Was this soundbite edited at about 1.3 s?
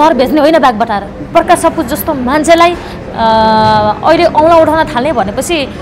yes; 1 cut; at 1.3 s

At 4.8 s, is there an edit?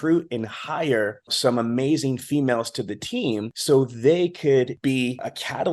yes; 3 cuts; at 1.3 s, 3.5 s, 4.8 s

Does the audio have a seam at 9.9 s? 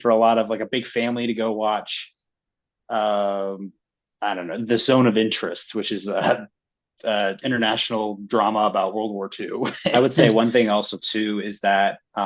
yes; 1 cut; at 9.9 s

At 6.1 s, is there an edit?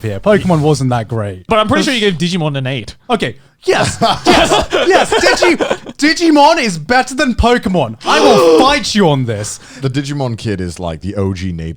no; 3 cuts; at 1.5 s, 2.9 s, 9.8 s

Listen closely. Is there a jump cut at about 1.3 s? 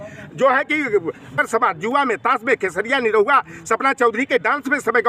yes; 1 cut; at 1.3 s

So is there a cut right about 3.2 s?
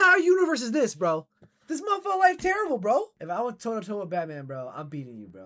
yes; 1 cut; at 3.2 s

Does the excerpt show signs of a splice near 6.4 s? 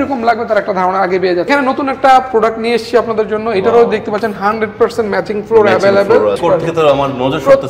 yes; 2 cuts; at 1.5 s, 6.4 s

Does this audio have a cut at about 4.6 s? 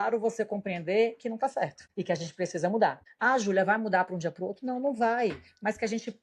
no; 2 cuts; at 1.9 s, 3.1 s

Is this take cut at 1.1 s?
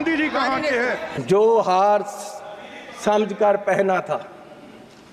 yes; 1 cut; at 1.1 s

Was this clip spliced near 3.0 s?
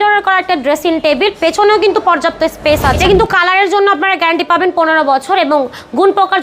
yes; 1 cut; at 3.0 s

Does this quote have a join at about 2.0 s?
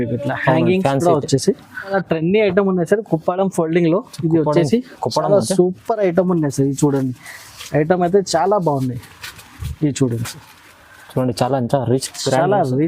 yes; 1 cut; at 2.0 s

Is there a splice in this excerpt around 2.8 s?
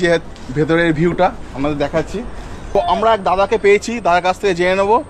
yes; 1 cut; at 2.8 s

